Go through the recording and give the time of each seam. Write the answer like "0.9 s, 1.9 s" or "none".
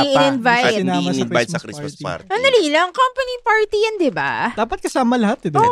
none